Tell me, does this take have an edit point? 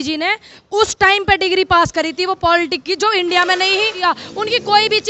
yes; 1 cut; at 4.0 s

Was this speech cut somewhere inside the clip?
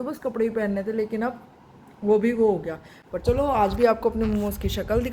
no; 0 cuts

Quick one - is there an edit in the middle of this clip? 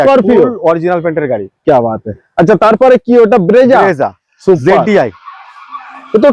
no; 0 cuts

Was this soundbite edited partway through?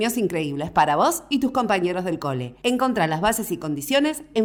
no; 0 cuts

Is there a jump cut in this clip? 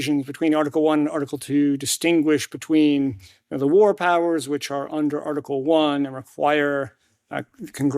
yes; 1 cut; at 2.8 s

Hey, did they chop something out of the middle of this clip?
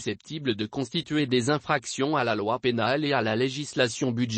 no; 0 cuts

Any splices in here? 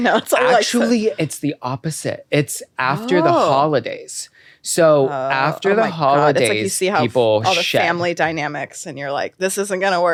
no; 0 cuts

